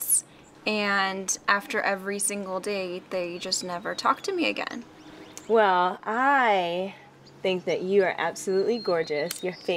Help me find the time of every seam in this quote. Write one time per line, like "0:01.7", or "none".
0:03.6